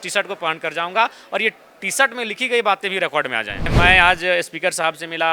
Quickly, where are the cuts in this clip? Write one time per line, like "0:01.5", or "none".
0:03.6